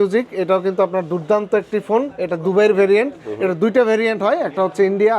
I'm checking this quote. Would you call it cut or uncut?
uncut